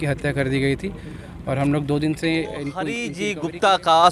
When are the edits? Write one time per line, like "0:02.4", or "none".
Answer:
0:03.1